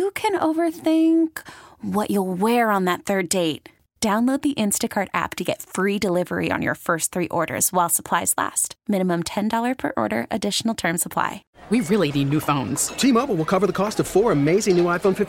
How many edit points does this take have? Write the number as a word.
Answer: one